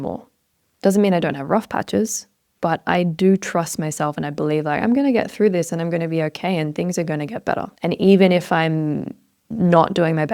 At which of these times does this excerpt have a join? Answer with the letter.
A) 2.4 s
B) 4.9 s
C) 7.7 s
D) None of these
C